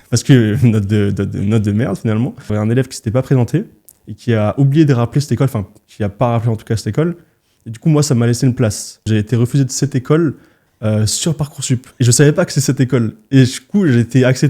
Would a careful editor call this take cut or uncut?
cut